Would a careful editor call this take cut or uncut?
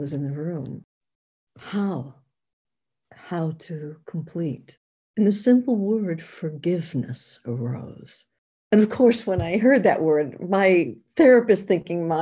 uncut